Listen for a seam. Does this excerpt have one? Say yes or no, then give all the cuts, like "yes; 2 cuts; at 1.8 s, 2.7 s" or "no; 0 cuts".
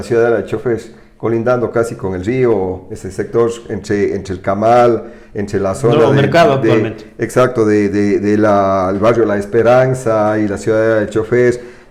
no; 0 cuts